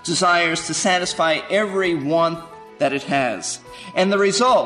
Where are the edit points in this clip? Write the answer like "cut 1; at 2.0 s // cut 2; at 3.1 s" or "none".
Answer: none